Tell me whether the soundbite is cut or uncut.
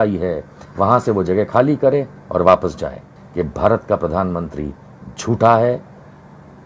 cut